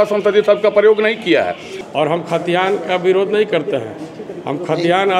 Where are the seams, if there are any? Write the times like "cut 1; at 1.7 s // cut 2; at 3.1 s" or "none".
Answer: cut 1; at 1.7 s